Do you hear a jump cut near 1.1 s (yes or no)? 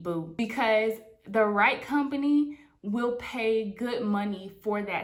no